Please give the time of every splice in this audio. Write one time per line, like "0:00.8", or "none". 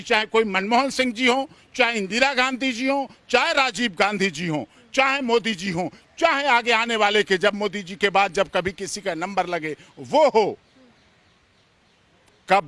none